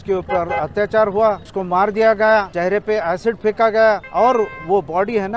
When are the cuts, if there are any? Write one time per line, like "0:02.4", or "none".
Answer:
0:01.5
0:02.5
0:04.1

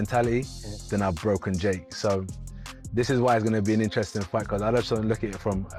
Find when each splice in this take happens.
none

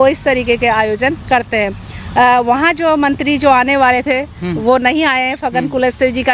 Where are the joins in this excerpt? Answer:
none

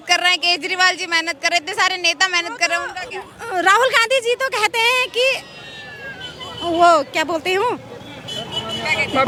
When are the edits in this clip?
none

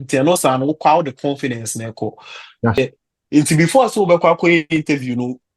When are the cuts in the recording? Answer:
0:02.8

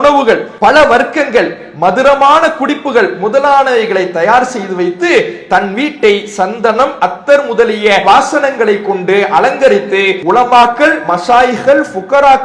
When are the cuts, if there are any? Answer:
0:10.2

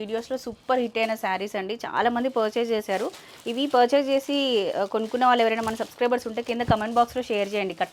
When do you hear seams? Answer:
none

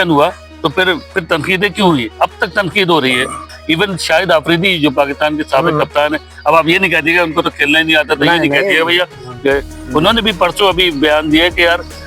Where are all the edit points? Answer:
0:03.5

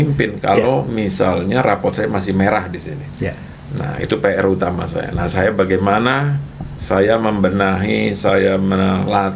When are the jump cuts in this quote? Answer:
none

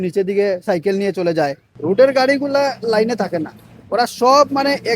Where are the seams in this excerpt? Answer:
0:01.7

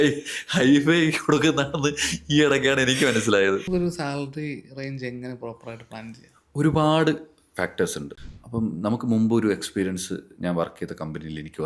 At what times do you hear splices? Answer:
0:03.6
0:08.2

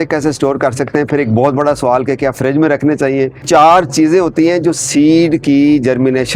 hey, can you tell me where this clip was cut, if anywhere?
0:03.4

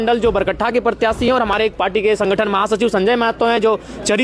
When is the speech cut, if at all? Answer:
none

